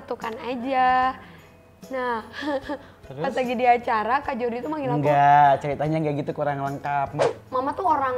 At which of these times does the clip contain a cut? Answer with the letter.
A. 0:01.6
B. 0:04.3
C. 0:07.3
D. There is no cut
C